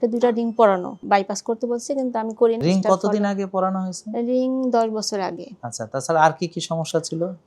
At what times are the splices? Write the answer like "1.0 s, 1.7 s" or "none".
1.0 s, 2.6 s